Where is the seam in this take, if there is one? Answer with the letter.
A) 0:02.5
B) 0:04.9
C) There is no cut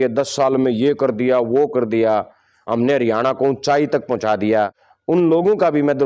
B